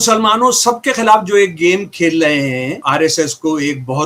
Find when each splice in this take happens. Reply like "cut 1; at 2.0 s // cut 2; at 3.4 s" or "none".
cut 1; at 2.8 s